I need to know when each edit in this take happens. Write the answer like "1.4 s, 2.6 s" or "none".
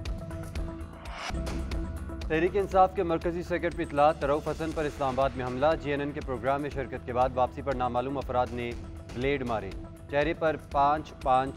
1.2 s